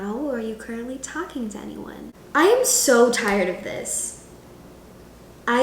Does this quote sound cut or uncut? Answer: cut